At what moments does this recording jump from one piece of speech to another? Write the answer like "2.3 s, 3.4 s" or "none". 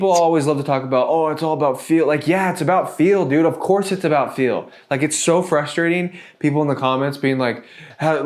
none